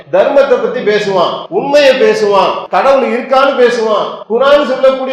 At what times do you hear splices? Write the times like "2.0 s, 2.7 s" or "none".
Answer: 1.4 s, 2.6 s, 4.1 s